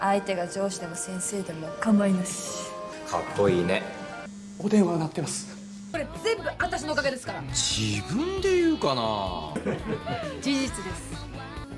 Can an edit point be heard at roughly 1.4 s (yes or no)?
no